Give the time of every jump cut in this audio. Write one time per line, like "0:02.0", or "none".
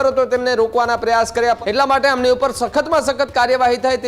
0:01.6